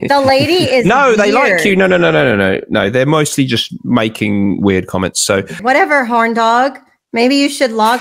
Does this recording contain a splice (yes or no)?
yes